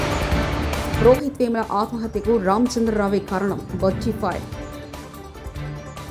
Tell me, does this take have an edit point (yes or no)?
yes